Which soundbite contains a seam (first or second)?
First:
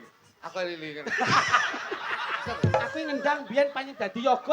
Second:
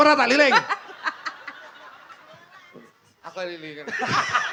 first